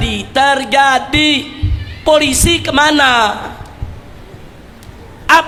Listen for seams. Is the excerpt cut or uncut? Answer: uncut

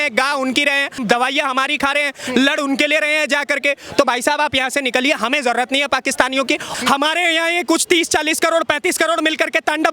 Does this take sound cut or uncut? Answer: cut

